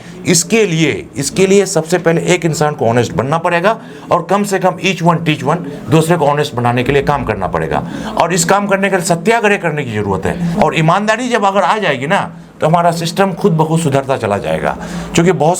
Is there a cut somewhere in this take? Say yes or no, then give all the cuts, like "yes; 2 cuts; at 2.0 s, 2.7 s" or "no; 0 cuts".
yes; 1 cut; at 10.5 s